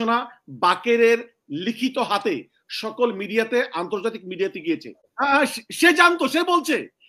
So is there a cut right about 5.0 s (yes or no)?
yes